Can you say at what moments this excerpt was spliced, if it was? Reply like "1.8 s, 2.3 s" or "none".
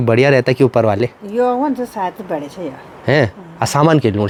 none